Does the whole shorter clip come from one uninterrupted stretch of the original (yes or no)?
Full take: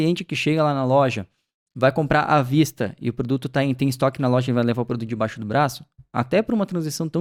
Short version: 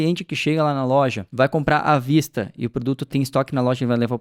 no